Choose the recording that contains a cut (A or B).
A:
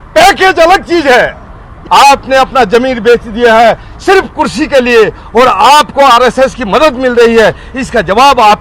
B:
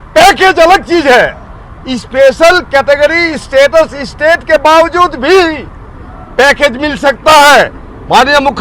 A